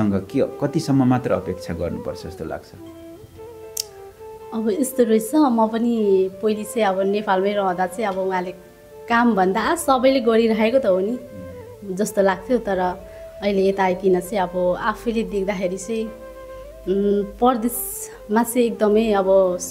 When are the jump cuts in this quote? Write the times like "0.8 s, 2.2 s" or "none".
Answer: none